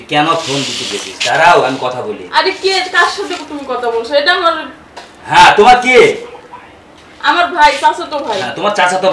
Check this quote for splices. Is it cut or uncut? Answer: uncut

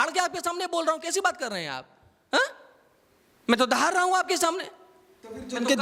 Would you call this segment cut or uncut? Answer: uncut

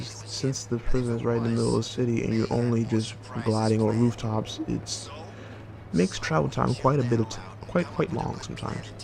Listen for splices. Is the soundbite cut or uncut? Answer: cut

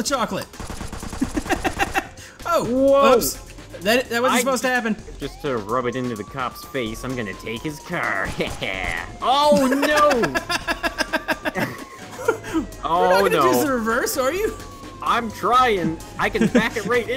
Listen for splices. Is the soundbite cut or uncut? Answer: cut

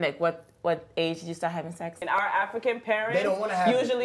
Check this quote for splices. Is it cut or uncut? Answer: cut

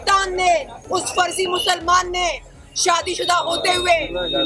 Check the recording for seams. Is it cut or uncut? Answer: uncut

